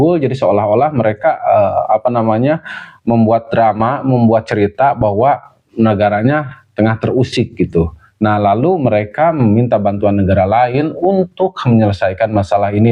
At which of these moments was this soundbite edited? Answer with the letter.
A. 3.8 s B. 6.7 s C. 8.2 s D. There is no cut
D